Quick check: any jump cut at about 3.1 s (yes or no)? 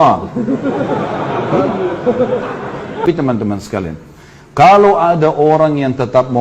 yes